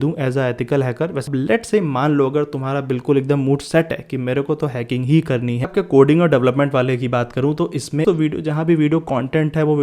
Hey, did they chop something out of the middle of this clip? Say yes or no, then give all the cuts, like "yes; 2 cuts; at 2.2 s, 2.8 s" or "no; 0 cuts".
yes; 3 cuts; at 1.2 s, 5.7 s, 8.0 s